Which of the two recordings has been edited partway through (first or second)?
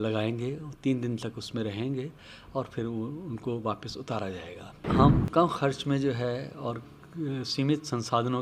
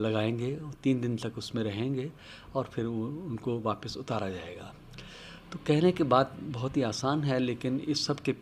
first